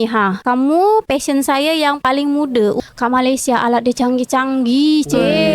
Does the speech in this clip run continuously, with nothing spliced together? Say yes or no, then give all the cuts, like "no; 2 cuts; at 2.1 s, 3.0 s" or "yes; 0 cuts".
no; 1 cut; at 2.8 s